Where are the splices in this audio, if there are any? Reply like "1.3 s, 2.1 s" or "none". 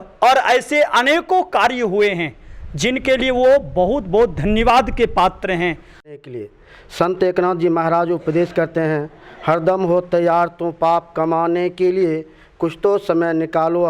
6.2 s

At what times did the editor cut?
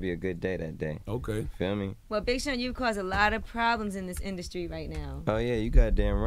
none

